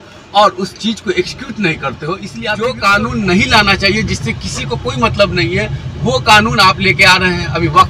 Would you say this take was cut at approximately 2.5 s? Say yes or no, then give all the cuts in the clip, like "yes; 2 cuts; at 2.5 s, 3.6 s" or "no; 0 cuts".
yes; 1 cut; at 2.5 s